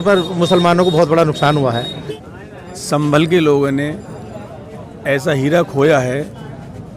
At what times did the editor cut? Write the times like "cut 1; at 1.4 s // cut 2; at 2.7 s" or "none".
cut 1; at 2.1 s